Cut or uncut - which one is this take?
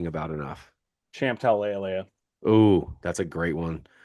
uncut